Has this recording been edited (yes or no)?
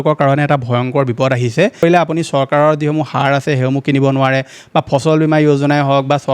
yes